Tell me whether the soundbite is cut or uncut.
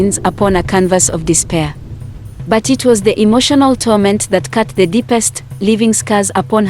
cut